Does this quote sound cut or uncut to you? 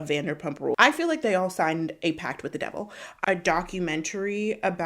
cut